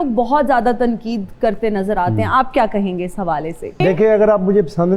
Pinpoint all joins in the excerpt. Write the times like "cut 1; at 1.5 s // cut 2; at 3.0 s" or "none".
cut 1; at 3.8 s